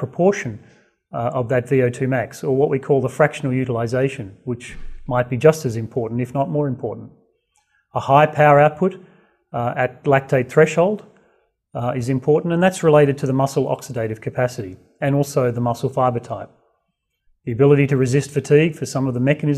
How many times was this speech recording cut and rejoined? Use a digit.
1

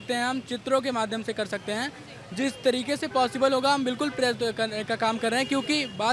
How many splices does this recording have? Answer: 0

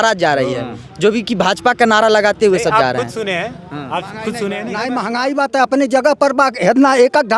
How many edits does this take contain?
1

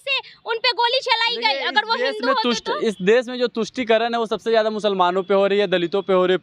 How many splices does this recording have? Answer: 0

